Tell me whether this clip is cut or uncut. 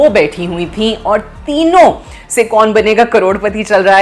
uncut